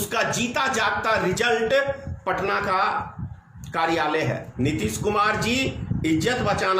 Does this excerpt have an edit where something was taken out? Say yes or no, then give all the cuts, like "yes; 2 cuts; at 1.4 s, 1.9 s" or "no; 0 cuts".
yes; 1 cut; at 4.5 s